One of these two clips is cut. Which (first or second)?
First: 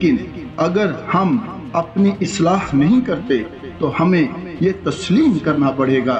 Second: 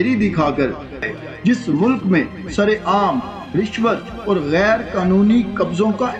second